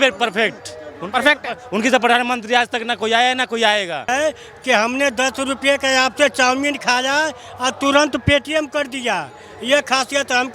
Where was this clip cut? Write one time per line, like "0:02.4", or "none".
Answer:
0:04.1